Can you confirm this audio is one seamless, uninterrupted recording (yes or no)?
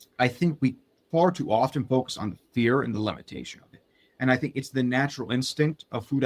yes